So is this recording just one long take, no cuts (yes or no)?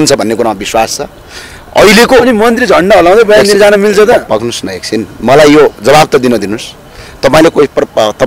yes